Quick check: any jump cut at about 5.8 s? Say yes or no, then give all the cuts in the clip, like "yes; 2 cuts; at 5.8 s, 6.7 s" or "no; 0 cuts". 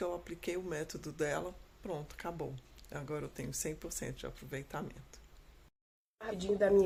no; 0 cuts